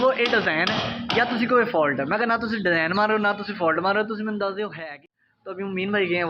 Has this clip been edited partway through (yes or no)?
yes